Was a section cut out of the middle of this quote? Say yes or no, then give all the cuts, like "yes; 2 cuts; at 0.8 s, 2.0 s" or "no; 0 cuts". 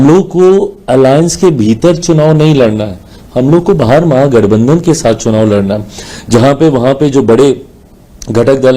no; 0 cuts